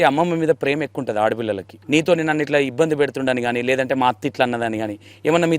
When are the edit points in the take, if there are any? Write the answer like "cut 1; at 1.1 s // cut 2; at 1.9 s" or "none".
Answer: cut 1; at 1.7 s